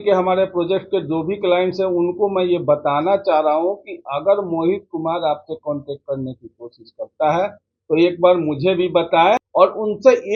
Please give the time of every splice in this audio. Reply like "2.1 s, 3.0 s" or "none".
9.4 s